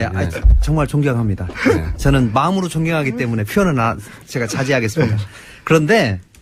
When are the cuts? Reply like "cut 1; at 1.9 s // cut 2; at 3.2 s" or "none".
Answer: cut 1; at 1.1 s